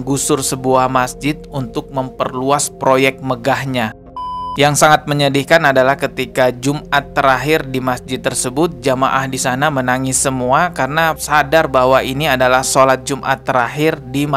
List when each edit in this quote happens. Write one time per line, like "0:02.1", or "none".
0:03.9